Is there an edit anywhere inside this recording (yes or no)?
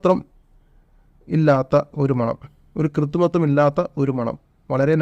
no